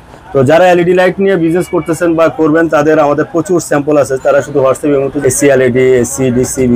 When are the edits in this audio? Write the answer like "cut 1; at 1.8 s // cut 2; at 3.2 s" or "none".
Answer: cut 1; at 5.1 s